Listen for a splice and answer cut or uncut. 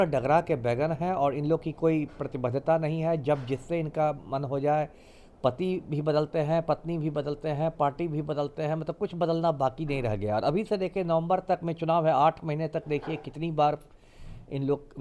uncut